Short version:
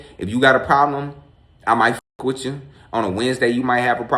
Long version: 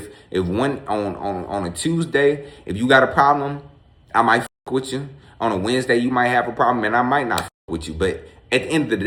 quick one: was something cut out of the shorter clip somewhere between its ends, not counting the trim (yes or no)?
no